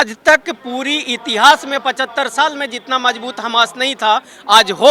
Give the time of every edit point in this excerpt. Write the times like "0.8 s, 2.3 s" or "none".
none